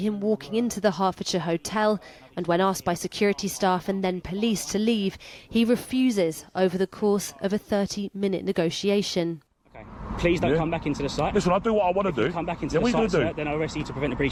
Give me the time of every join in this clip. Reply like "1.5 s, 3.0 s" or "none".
none